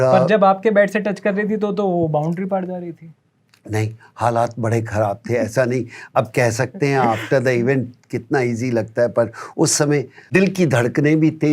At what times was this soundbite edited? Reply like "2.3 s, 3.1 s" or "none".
10.3 s